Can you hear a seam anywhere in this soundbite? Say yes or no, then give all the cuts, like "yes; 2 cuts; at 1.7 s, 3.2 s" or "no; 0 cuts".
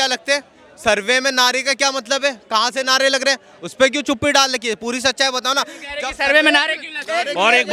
no; 0 cuts